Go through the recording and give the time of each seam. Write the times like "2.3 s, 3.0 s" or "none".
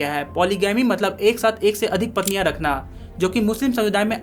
none

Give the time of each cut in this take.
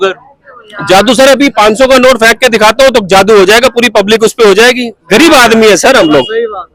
none

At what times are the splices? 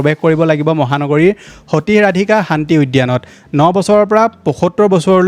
none

